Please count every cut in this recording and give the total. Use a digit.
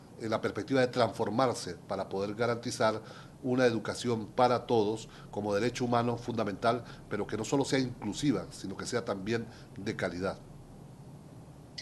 1